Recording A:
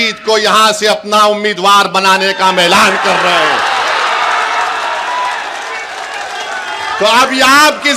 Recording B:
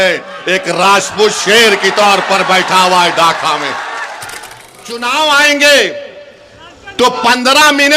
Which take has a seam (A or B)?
B